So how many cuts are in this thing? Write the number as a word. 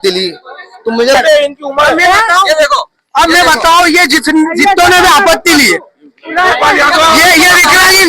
one